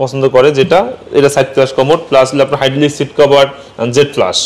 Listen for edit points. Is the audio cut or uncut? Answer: uncut